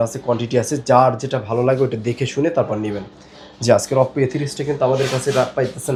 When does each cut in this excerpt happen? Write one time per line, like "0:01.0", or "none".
none